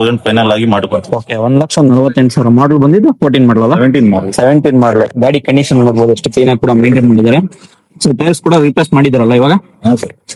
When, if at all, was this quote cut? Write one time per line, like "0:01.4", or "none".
none

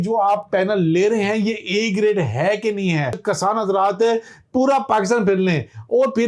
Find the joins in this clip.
0:03.2

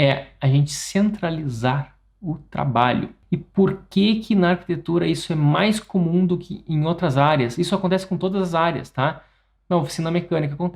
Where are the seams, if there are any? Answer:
0:03.2

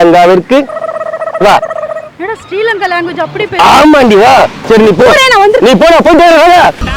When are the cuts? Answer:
0:04.6

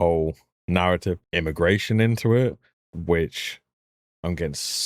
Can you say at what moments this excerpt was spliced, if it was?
0:01.2

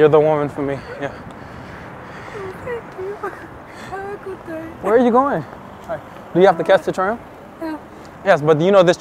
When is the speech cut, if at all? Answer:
none

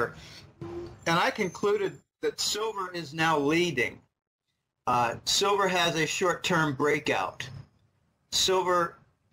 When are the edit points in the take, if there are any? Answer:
none

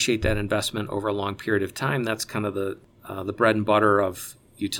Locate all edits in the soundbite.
0:02.9

